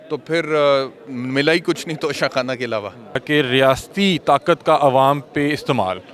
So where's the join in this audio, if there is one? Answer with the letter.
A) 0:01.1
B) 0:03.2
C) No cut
B